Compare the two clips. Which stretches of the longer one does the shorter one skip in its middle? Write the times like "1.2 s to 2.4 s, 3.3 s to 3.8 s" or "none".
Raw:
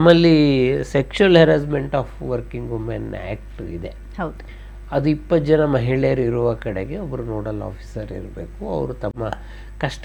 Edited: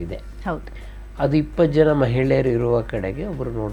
none